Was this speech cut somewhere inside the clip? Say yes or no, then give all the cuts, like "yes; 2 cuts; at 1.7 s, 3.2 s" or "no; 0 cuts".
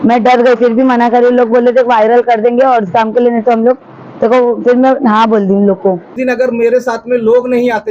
yes; 1 cut; at 6.2 s